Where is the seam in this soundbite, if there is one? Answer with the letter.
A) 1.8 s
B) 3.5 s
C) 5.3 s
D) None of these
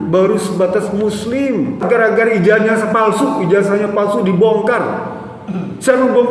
A